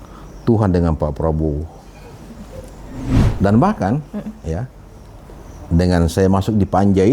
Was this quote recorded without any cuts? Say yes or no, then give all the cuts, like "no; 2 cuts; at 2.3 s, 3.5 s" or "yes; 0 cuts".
no; 1 cut; at 3.1 s